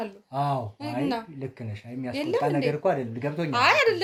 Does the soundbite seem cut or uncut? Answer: uncut